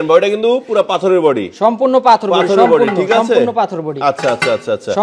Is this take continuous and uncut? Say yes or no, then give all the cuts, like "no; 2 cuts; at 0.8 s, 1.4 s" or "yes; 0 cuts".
yes; 0 cuts